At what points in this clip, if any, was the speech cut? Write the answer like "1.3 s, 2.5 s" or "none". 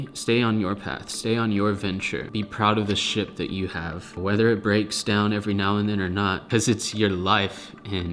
2.2 s, 6.4 s